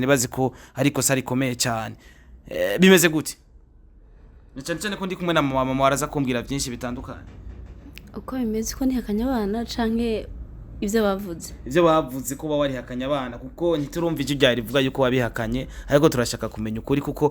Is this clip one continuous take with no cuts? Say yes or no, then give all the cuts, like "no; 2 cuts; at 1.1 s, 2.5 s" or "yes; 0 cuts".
yes; 0 cuts